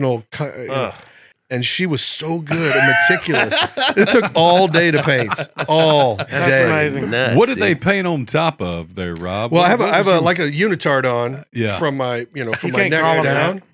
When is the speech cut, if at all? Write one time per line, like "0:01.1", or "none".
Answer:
0:01.4